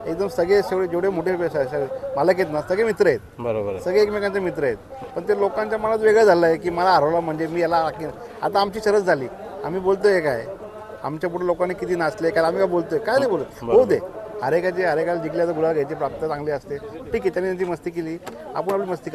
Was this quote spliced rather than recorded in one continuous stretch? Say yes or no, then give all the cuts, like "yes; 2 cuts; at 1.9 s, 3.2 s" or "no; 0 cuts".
no; 0 cuts